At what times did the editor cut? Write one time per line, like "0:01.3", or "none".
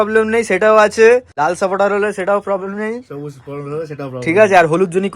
0:01.3